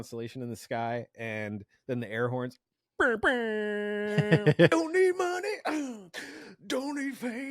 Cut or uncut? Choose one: cut